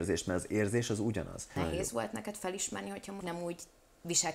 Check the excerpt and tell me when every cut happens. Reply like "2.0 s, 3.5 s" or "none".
1.5 s, 3.2 s